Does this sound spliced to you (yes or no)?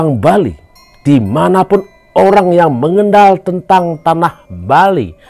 no